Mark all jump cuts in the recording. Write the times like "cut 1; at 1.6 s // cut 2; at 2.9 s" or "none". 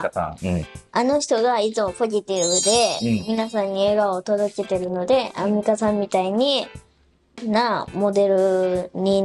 none